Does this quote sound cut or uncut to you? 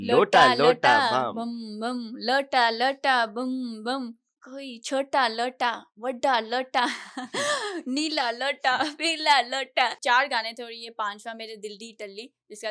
cut